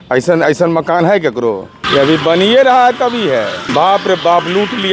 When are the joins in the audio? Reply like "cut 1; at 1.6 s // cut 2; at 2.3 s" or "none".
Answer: cut 1; at 1.7 s // cut 2; at 3.6 s